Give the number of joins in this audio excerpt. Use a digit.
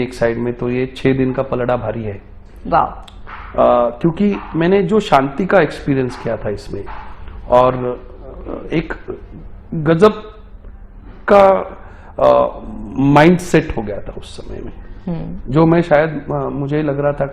0